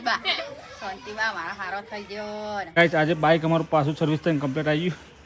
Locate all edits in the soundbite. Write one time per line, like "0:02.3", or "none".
0:02.8